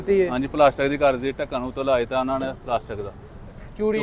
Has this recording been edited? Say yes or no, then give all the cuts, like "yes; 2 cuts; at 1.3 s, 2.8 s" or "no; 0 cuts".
no; 0 cuts